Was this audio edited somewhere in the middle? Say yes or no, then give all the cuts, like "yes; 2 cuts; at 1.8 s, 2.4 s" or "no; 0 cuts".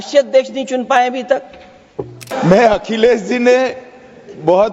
yes; 1 cut; at 2.3 s